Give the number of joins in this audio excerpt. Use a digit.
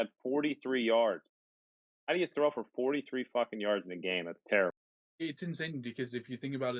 1